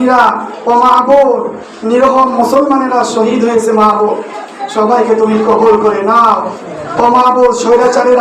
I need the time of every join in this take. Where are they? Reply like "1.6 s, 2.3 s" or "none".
none